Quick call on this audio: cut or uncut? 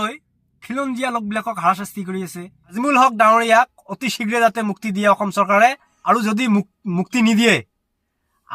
cut